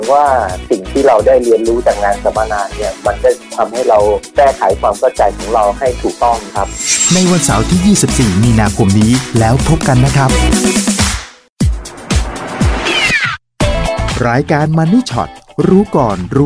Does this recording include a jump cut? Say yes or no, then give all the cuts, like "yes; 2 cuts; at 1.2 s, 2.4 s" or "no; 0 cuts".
yes; 1 cut; at 11.4 s